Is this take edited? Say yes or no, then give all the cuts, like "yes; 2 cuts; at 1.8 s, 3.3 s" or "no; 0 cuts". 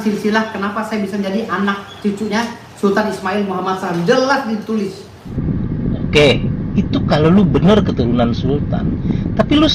yes; 1 cut; at 5.3 s